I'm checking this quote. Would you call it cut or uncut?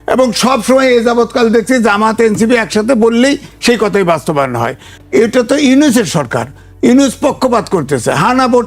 cut